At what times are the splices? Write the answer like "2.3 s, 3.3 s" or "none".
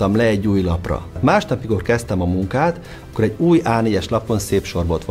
1.2 s